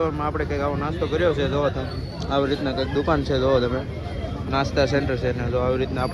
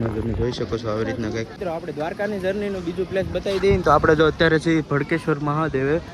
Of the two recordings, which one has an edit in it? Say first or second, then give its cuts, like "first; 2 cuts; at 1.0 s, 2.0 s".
second; 1 cut; at 1.5 s